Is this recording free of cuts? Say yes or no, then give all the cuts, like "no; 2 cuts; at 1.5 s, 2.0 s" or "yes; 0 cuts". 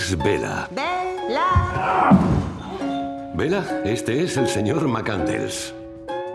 yes; 0 cuts